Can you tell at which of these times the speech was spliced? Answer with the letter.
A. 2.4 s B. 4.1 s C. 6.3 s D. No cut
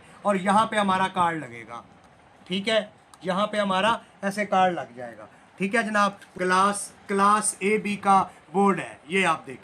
C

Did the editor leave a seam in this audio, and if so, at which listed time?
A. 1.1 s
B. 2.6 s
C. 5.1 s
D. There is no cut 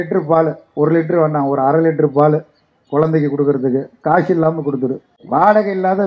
C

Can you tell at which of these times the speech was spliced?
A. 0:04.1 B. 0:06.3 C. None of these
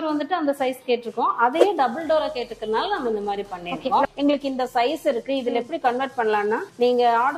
A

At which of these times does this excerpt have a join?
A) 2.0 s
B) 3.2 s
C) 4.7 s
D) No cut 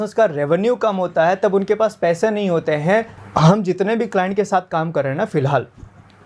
B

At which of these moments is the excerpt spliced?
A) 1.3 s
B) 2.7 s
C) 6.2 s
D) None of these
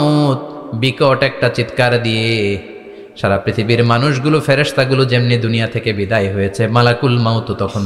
D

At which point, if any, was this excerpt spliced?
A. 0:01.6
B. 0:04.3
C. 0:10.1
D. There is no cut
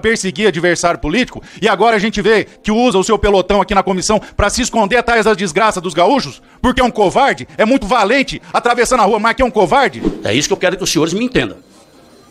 C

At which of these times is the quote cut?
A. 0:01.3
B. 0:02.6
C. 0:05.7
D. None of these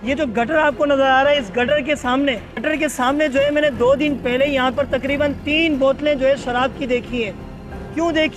B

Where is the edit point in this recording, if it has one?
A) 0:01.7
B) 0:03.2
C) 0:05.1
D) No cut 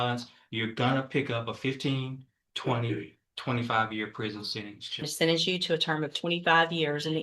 C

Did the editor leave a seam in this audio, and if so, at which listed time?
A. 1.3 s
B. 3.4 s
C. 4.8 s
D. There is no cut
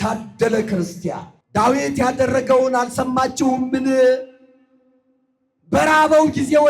A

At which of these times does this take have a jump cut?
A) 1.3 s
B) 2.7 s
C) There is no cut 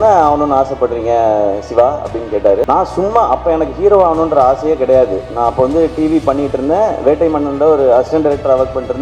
B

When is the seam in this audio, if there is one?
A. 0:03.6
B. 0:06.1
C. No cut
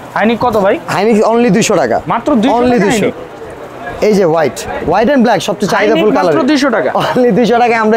C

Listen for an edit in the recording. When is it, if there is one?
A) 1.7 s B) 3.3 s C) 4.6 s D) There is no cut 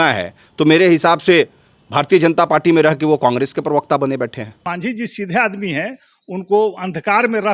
C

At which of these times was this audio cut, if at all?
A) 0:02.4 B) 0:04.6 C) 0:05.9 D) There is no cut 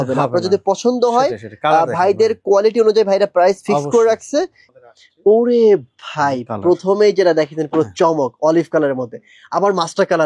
B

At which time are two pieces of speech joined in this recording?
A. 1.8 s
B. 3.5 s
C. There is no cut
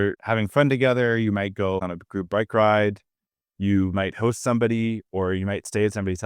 A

